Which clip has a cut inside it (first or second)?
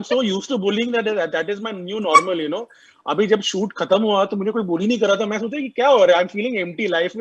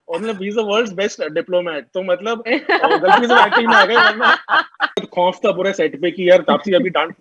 second